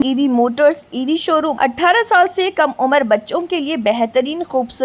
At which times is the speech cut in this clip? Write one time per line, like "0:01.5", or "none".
0:01.5